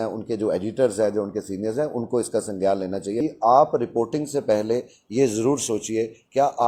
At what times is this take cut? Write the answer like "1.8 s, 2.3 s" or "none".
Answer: 3.2 s